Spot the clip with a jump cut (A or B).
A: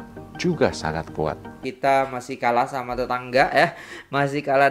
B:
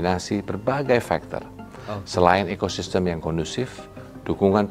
A